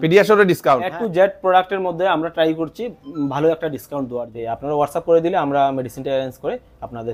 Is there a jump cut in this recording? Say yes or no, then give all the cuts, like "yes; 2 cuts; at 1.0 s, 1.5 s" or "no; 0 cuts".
yes; 2 cuts; at 0.9 s, 4.3 s